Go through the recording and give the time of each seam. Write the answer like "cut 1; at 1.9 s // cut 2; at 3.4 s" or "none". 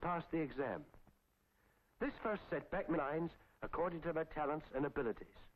none